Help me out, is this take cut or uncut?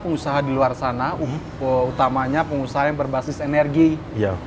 uncut